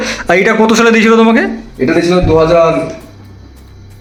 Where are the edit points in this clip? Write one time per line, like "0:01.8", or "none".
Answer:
none